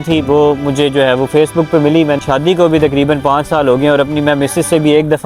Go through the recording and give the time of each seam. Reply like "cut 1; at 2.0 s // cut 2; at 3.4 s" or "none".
cut 1; at 2.2 s

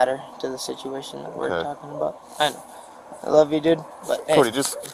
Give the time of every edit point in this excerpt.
none

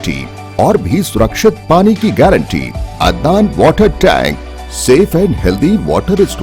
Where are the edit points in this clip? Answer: cut 1; at 2.8 s

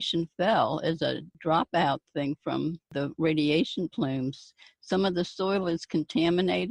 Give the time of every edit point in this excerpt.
cut 1; at 1.3 s // cut 2; at 2.9 s

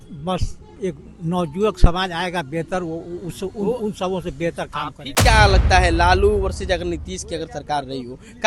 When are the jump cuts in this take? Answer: cut 1; at 5.2 s

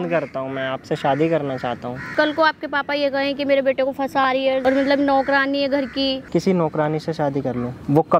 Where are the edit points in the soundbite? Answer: cut 1; at 2.1 s // cut 2; at 4.6 s // cut 3; at 6.2 s

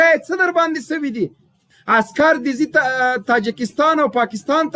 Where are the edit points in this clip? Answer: cut 1; at 1.7 s

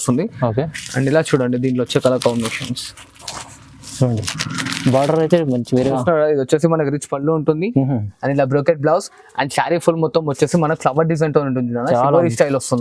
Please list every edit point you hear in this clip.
cut 1; at 6.0 s

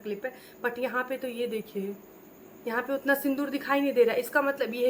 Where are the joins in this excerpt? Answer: none

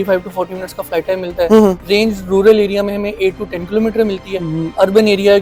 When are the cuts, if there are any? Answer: none

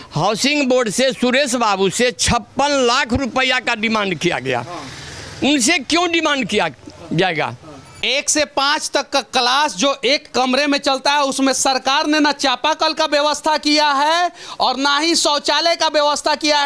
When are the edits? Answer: cut 1; at 8.0 s

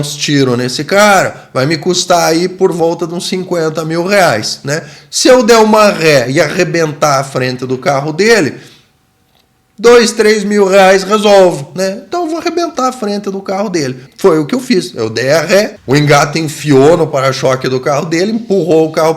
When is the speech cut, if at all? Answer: cut 1; at 14.1 s // cut 2; at 15.8 s

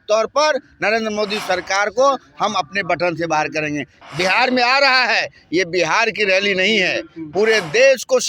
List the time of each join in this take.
cut 1; at 3.9 s

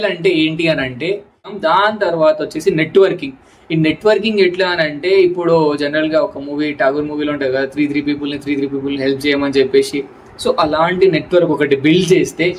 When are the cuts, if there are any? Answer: cut 1; at 1.5 s

